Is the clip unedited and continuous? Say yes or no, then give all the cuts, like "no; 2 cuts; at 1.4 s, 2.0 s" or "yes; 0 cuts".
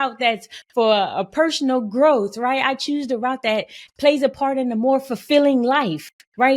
no; 1 cut; at 3.8 s